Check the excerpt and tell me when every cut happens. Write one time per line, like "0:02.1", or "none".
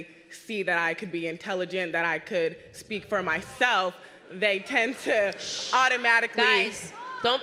none